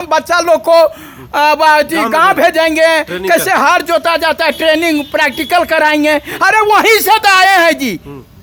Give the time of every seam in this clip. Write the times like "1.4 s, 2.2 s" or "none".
none